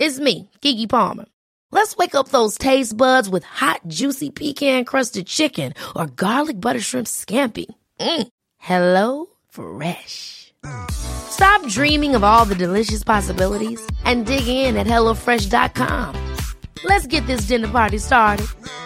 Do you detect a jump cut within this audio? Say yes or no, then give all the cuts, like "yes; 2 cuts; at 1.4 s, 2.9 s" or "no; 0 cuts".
no; 0 cuts